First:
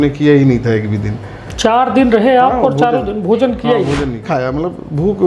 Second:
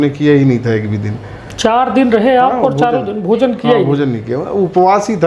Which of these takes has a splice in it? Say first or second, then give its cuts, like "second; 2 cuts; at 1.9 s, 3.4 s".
first; 1 cut; at 4.3 s